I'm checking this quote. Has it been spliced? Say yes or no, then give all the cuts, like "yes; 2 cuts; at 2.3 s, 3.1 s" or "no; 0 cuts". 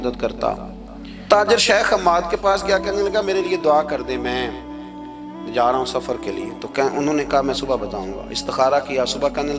yes; 1 cut; at 1.3 s